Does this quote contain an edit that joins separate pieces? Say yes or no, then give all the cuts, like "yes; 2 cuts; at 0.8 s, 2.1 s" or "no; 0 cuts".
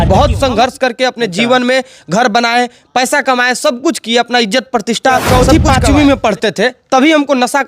yes; 1 cut; at 5.3 s